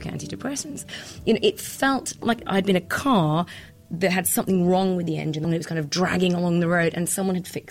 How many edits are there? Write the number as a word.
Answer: two